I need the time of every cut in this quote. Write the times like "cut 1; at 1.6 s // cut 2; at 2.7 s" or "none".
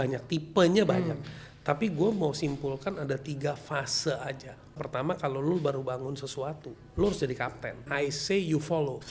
cut 1; at 4.8 s // cut 2; at 7.9 s